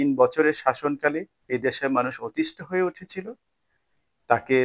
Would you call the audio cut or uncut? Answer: cut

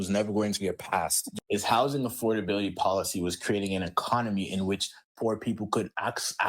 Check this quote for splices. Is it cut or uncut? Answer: cut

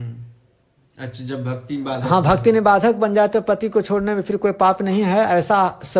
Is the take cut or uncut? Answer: uncut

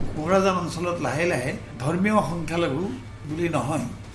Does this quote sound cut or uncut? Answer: cut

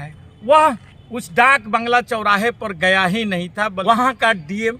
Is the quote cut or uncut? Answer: cut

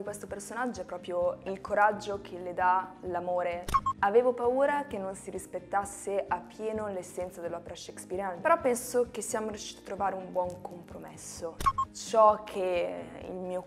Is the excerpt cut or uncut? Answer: cut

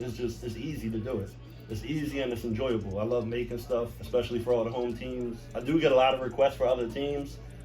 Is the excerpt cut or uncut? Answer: cut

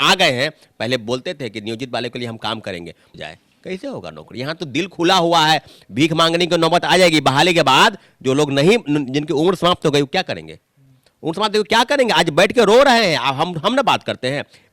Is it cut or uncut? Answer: cut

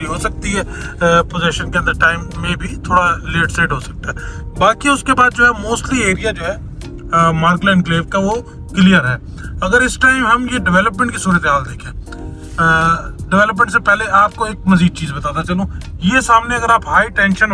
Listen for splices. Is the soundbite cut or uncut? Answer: uncut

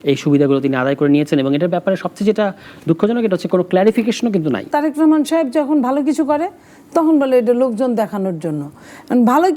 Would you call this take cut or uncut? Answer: cut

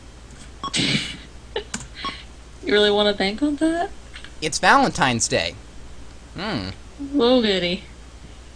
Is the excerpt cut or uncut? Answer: cut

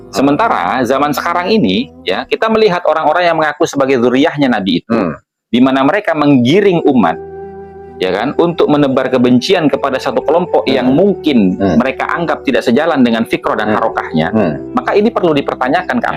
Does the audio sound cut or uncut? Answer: uncut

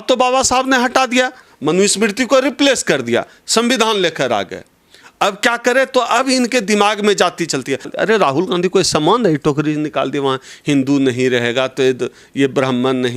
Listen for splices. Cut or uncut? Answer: cut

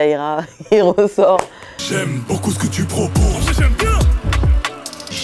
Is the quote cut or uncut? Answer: cut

